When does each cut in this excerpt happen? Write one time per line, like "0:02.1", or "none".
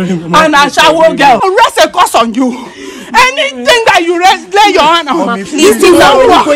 0:01.4